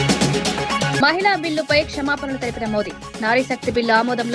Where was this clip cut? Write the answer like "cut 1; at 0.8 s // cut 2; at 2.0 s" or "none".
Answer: cut 1; at 0.9 s